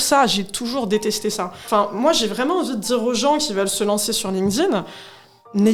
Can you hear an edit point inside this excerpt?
yes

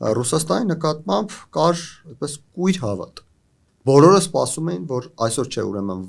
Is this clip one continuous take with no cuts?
no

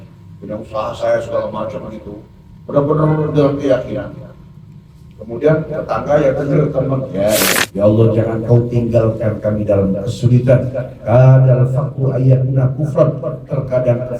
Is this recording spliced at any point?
yes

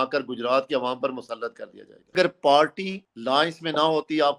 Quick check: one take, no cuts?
no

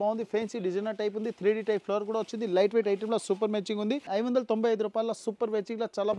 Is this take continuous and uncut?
yes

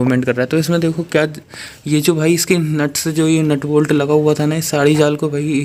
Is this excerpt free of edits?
yes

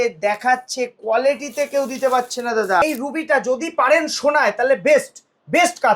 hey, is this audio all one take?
no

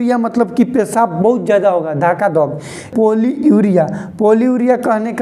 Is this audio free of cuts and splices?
no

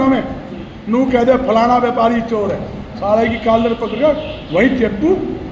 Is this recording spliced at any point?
no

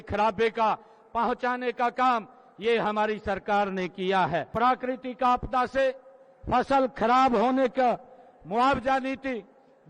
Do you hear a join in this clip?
yes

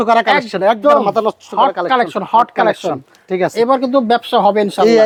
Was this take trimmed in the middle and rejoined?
no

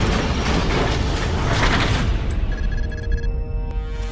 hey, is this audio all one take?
yes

